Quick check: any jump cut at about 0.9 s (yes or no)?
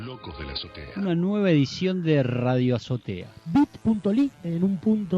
yes